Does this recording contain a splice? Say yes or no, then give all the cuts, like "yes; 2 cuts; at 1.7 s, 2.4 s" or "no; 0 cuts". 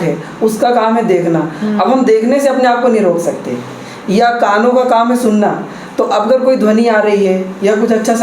no; 0 cuts